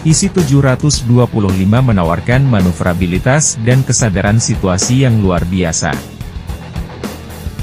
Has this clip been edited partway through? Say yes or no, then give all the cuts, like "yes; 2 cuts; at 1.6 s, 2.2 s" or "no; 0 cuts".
yes; 1 cut; at 6.2 s